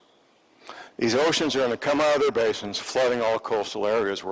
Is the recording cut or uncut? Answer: uncut